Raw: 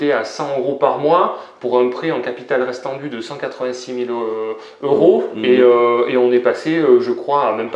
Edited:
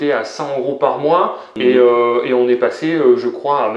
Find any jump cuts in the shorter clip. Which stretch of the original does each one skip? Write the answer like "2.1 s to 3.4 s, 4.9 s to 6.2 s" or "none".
1.5 s to 5.3 s

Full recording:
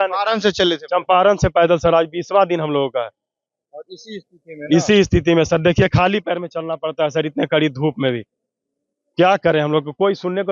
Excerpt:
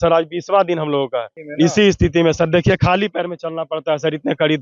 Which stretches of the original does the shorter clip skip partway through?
3.2 s to 4.5 s

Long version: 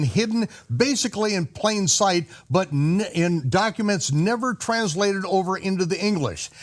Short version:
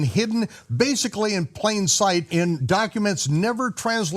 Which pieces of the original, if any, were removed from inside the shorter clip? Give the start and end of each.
2.3 s to 3.1 s

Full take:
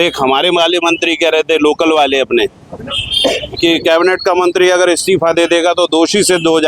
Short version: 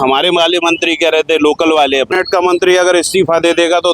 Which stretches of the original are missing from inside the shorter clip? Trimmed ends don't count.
2.4 s to 4.1 s

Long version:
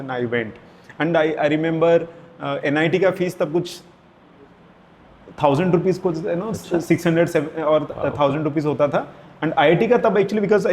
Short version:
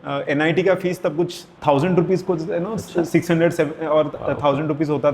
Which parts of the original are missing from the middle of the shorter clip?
3.8 s to 5.2 s

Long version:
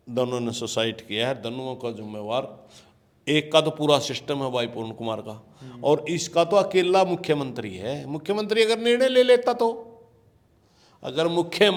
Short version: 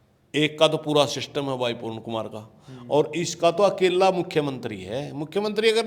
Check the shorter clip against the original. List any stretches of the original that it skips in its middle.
none

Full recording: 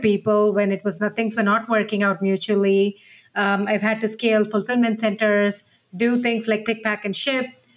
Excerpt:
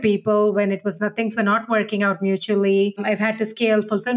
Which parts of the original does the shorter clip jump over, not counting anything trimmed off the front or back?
3.0 s to 3.6 s

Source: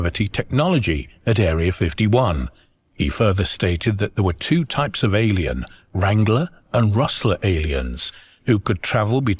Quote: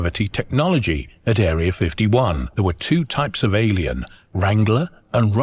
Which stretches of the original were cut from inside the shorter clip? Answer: 2.5 s to 4.1 s

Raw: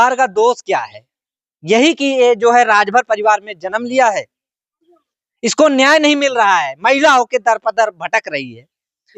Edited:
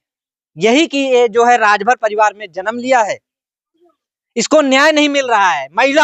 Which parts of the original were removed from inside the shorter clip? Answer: none

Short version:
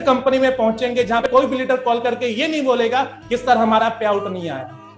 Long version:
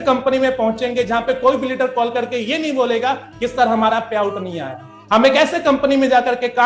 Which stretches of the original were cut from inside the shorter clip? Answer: 1.2 s to 1.4 s

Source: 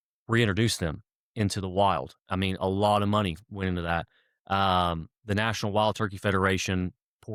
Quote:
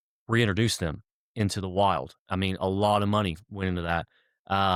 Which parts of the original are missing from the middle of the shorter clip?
none

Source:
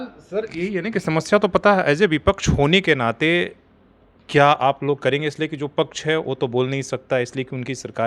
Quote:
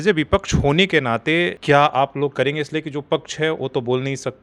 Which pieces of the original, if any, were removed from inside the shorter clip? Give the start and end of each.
3.5 s to 4.2 s

